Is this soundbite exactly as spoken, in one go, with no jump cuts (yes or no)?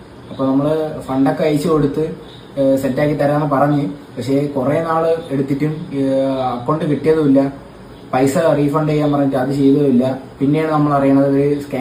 yes